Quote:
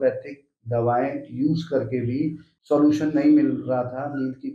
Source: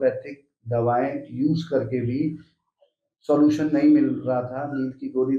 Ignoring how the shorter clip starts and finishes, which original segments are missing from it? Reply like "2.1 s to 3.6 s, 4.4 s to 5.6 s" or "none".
2.5 s to 3.1 s

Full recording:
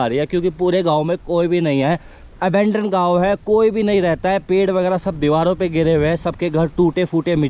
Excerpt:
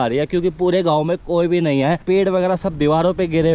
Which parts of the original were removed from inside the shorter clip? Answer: 2.0 s to 4.4 s

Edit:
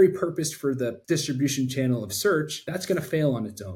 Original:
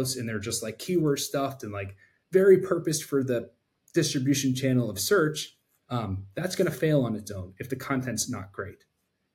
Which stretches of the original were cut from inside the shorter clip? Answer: 3.5 s to 3.8 s, 5.4 s to 6.3 s

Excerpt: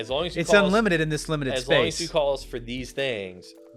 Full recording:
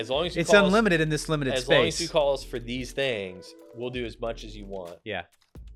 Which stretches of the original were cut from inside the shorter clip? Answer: none

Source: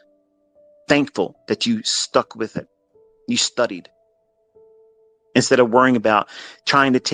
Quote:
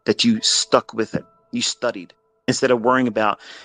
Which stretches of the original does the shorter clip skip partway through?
2.8 s to 3.1 s, 4.2 s to 5.4 s

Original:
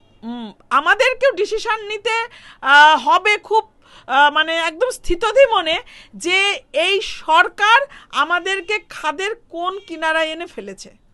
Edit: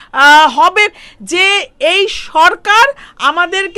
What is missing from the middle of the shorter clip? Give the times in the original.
3.4 s to 5.9 s

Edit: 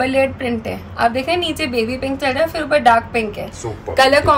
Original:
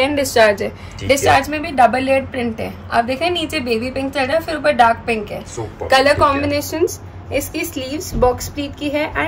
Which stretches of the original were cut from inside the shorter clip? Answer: none

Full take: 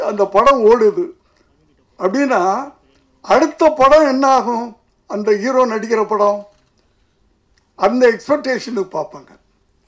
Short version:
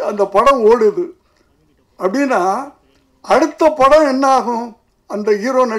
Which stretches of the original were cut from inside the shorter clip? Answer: none

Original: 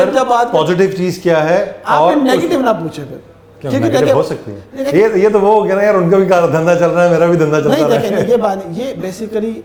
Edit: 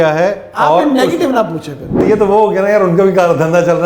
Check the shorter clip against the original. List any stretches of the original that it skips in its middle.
3.3 s to 5.2 s

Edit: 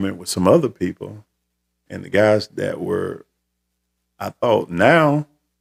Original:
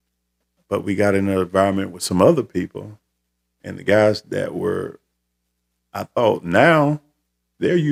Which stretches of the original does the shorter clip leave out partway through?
none

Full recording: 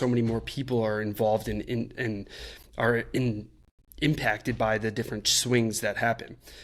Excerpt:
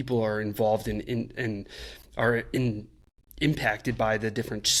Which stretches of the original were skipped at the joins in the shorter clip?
none

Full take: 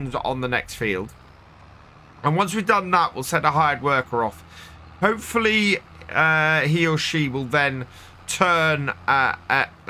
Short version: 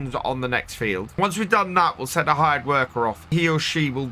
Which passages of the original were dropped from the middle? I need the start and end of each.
1.2 s to 2.3 s, 4.5 s to 6.7 s

